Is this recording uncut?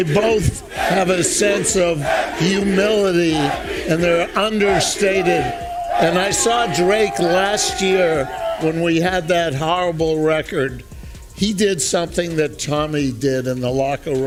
yes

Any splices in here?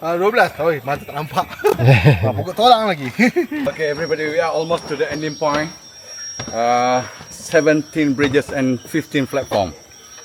yes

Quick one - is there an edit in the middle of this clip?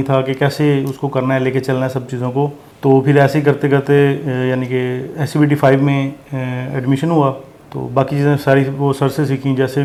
no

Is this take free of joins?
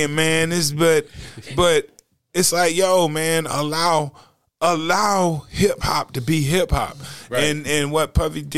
yes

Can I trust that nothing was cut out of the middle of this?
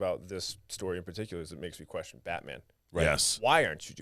yes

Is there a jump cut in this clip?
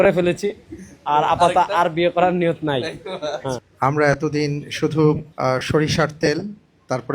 yes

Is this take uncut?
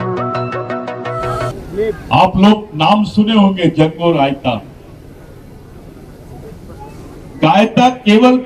no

